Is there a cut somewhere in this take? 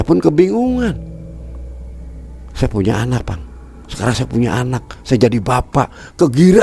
yes; 2 cuts; at 0.9 s, 2.5 s

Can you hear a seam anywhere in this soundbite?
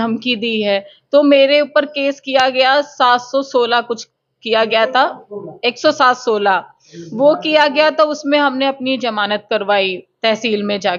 no; 0 cuts

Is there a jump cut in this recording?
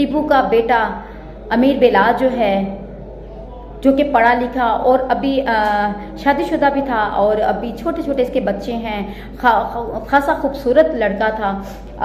no; 0 cuts

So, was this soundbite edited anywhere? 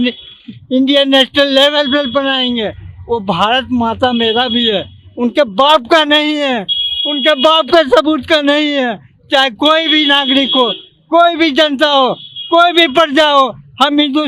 no; 0 cuts

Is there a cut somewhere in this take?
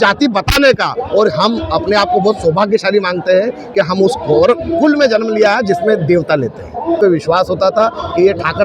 yes; 1 cut; at 7.0 s

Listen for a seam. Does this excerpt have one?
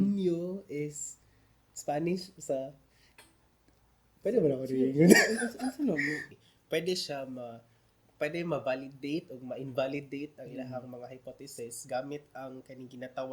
yes; 1 cut; at 6.3 s

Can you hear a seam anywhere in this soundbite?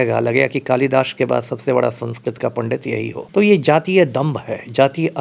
yes; 1 cut; at 3.2 s

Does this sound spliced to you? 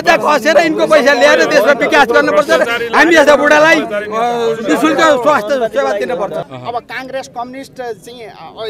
yes; 1 cut; at 6.4 s

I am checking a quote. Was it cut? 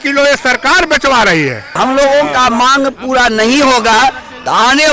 yes; 1 cut; at 1.8 s

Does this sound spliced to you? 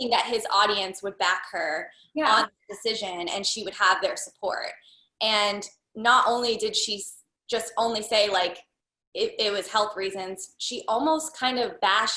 no; 0 cuts

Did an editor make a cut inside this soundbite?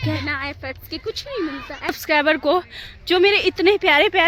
yes; 1 cut; at 2.0 s

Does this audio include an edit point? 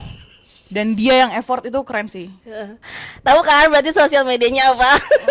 no; 0 cuts

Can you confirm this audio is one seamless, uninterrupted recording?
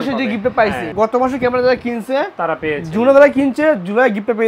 yes; 0 cuts

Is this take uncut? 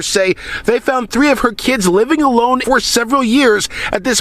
no; 1 cut; at 2.6 s

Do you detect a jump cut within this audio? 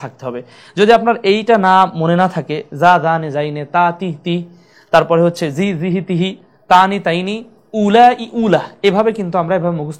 no; 0 cuts

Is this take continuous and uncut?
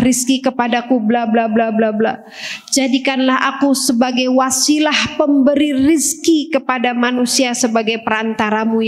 yes; 0 cuts

